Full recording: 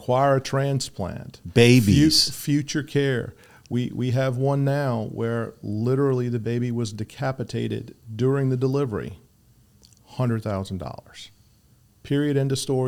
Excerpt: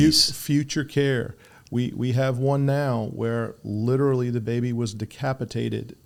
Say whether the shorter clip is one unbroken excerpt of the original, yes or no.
yes